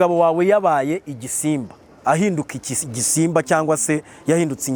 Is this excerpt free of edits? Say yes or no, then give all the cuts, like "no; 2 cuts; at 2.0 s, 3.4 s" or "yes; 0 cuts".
yes; 0 cuts